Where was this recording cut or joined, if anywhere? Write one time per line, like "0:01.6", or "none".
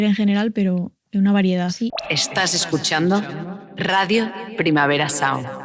0:01.9